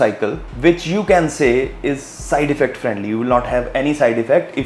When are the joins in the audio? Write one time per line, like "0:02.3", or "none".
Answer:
none

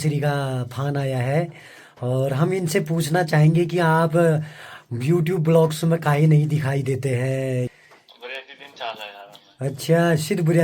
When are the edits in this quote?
0:07.7

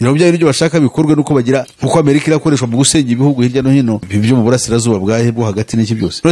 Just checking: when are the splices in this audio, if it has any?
0:01.7

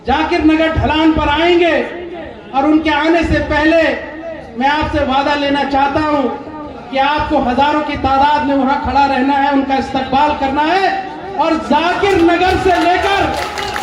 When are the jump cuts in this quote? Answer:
none

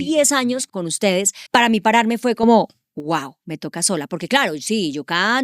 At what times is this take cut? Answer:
0:01.1

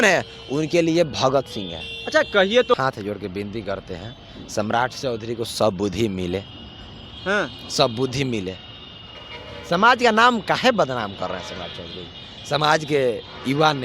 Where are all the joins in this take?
0:02.7

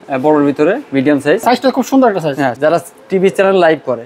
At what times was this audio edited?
0:01.4
0:02.5

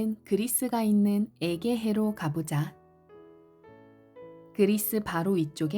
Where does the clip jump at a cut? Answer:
0:02.8
0:04.5

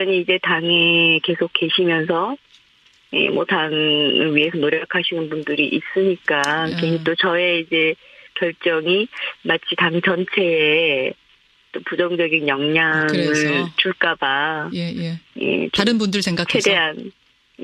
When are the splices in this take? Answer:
none

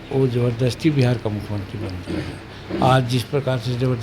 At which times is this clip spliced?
none

